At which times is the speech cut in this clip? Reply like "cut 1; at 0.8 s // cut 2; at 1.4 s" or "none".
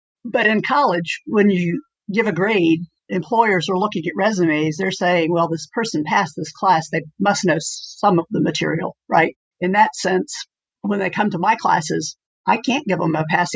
cut 1; at 9.4 s